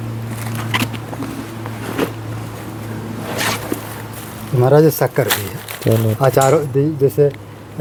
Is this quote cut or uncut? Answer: uncut